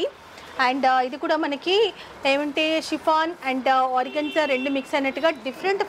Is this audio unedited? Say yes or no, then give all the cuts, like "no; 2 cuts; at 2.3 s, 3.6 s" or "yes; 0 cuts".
yes; 0 cuts